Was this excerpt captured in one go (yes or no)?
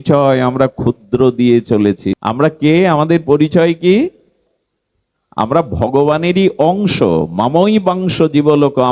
no